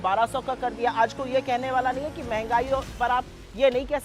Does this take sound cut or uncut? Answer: uncut